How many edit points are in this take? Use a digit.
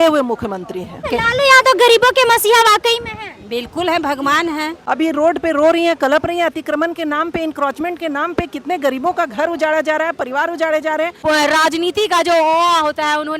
3